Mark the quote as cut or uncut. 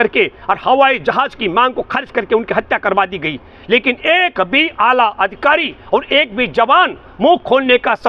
uncut